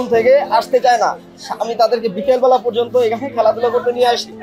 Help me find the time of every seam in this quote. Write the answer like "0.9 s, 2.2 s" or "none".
none